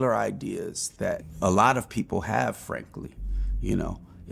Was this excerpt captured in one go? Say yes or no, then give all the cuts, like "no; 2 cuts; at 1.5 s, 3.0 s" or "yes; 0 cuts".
no; 1 cut; at 1.3 s